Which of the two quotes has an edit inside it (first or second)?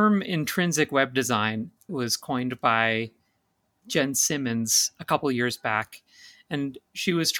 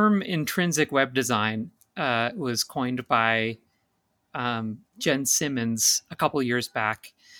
first